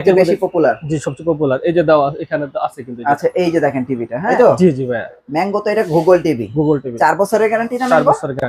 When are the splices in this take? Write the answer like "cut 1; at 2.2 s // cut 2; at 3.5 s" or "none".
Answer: cut 1; at 4.3 s